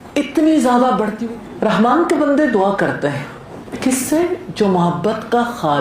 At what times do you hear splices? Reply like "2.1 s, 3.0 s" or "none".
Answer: 1.2 s